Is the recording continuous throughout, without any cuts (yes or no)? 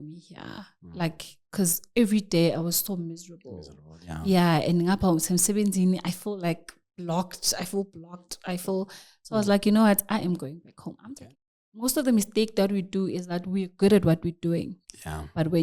no